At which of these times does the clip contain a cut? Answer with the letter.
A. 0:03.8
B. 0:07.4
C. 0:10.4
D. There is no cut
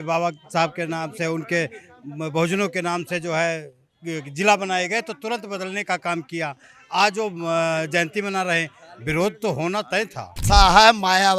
C